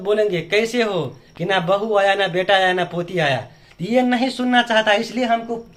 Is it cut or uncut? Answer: uncut